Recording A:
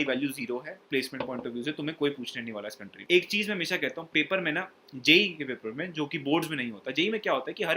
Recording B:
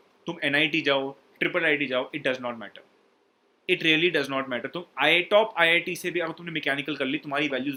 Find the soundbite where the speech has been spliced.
A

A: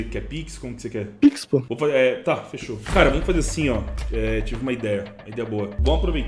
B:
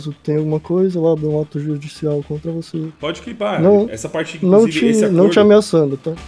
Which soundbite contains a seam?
A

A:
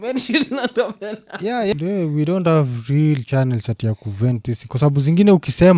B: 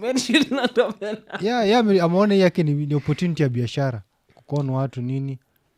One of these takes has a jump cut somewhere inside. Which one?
A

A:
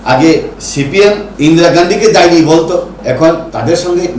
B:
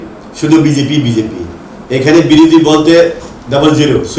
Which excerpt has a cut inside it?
A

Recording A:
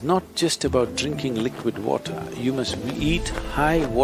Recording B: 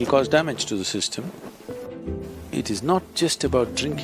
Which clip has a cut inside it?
B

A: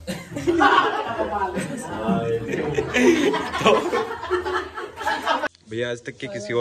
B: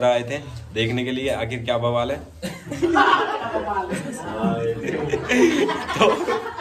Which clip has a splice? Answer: A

